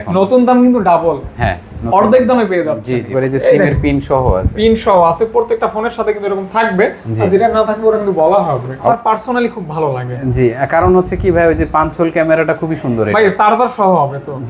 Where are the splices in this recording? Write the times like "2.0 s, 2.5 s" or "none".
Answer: 3.1 s, 8.9 s